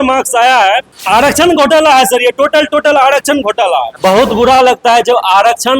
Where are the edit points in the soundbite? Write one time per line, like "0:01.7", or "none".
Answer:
0:00.9
0:03.9